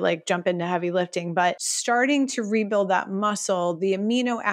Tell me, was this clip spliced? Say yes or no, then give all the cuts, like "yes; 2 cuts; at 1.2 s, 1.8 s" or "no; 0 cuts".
yes; 1 cut; at 1.7 s